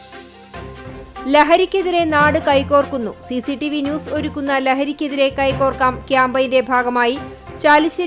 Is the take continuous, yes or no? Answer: yes